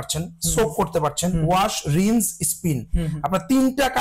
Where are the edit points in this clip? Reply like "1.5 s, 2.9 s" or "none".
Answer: none